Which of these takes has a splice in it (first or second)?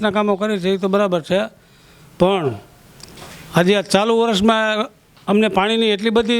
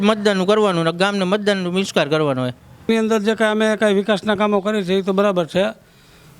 second